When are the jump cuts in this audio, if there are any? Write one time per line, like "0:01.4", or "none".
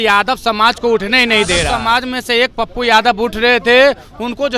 0:01.7